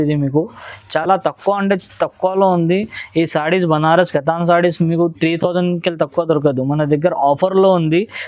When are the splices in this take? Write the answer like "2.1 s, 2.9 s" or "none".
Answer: none